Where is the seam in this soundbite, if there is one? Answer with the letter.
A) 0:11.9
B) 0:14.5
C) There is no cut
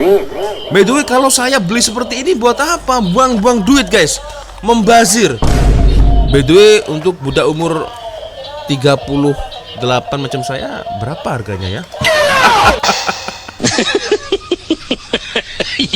C